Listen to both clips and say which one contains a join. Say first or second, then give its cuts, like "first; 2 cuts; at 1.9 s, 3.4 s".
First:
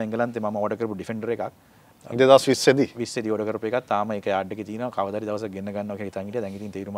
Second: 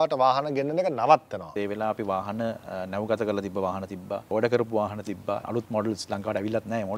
second; 3 cuts; at 1.5 s, 4.3 s, 5.5 s